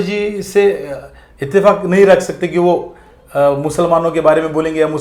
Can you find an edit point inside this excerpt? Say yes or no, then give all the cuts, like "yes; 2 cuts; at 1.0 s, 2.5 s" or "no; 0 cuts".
no; 0 cuts